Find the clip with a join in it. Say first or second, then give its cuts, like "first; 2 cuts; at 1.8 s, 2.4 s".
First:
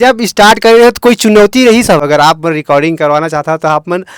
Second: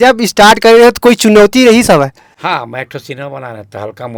first; 1 cut; at 2.0 s